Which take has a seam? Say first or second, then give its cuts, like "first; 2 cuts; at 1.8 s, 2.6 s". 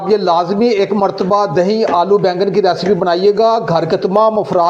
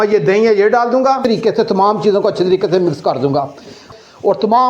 second; 2 cuts; at 1.2 s, 3.9 s